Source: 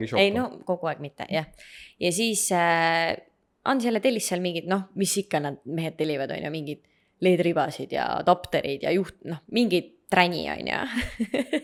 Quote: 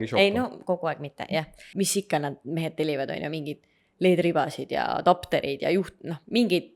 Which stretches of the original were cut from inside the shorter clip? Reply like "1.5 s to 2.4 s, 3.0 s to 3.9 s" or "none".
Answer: 1.7 s to 4.9 s

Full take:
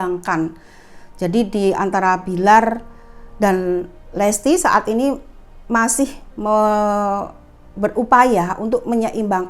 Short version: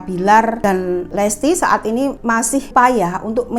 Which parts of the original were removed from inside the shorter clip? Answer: 3.1 s to 4.0 s, 5.7 s to 8.0 s

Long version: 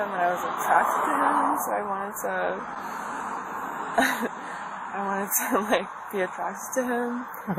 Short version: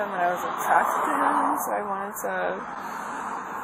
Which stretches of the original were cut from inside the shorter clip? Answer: none

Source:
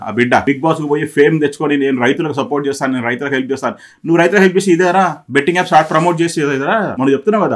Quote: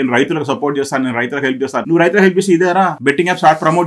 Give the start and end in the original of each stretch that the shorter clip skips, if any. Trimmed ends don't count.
3.7 s to 4.0 s, 5.1 s to 5.2 s

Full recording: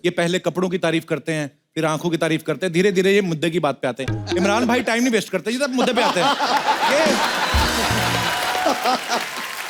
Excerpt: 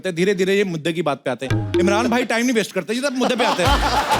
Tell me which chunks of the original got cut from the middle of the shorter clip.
none

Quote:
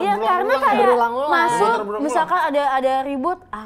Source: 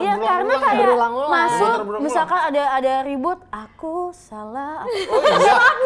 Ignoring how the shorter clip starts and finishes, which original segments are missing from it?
none

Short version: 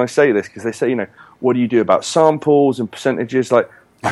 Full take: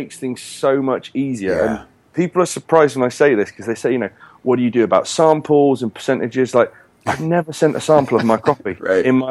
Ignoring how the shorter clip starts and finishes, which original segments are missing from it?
none

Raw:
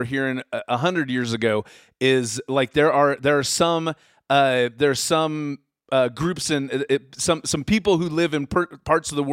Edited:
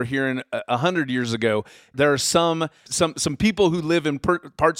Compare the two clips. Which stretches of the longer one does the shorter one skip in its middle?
1.9 s to 3.2 s, 4.1 s to 7.1 s

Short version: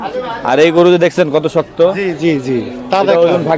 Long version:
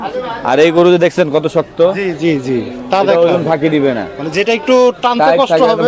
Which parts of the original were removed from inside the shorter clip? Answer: none

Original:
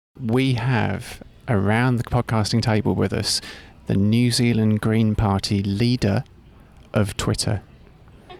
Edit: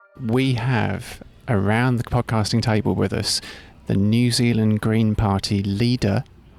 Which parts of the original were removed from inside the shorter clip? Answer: none

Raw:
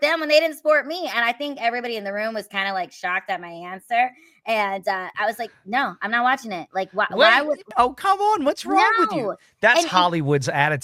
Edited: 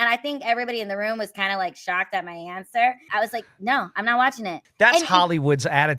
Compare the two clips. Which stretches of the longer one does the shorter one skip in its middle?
4.2 s to 5.1 s, 6.7 s to 9.4 s

